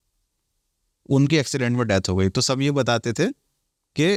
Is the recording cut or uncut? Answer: uncut